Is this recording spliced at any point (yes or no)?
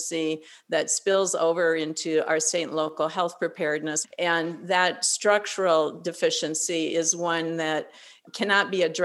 yes